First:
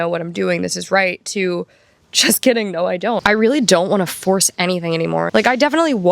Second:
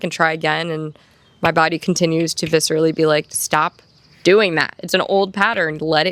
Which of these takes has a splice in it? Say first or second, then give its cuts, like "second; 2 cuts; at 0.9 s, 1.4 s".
first; 2 cuts; at 3.2 s, 5.3 s